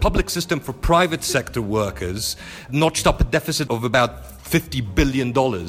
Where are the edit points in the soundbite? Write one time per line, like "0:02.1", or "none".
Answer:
0:02.7
0:03.6